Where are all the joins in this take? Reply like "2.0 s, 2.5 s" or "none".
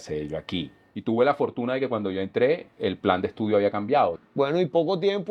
0.9 s, 4.2 s